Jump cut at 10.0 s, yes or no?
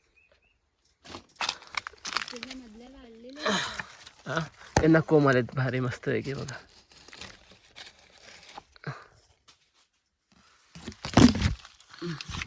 no